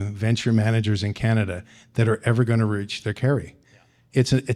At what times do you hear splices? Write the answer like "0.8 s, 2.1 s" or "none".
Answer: none